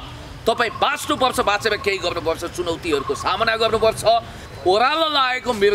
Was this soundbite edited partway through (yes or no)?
yes